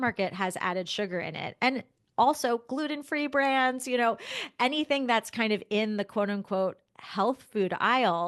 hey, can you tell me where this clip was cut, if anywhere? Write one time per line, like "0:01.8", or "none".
none